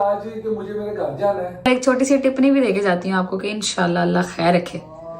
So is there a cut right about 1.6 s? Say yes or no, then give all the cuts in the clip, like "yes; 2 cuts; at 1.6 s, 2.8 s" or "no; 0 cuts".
yes; 1 cut; at 1.6 s